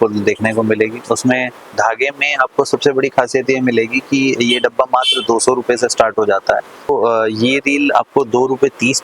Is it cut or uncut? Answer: cut